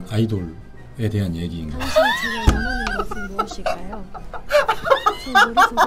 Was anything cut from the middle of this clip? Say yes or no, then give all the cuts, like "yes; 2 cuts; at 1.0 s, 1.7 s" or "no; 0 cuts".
no; 0 cuts